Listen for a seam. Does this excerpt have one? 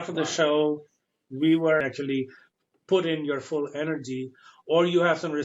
yes; 1 cut; at 1.8 s

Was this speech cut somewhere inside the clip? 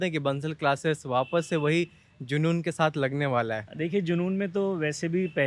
no; 0 cuts

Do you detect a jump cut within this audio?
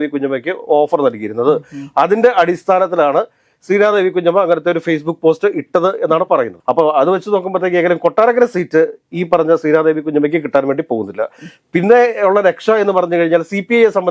no; 0 cuts

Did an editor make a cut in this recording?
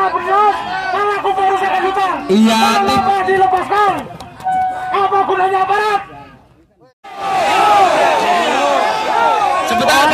yes; 1 cut; at 7.3 s

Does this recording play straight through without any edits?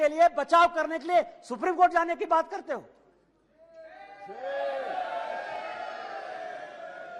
yes; 0 cuts

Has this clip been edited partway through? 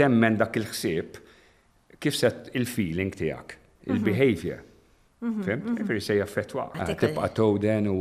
yes; 1 cut; at 6.8 s

